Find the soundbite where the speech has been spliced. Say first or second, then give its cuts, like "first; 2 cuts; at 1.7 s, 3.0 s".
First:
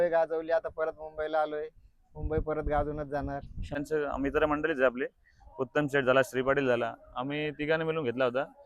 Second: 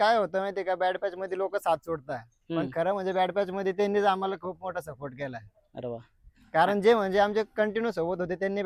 first; 1 cut; at 3.7 s